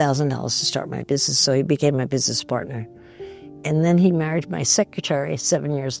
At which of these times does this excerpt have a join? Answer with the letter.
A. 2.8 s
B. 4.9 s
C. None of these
C